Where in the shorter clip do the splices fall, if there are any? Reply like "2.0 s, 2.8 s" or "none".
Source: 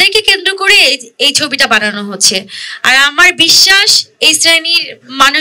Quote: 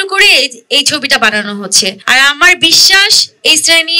2.0 s